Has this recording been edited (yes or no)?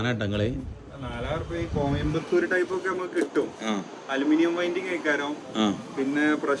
no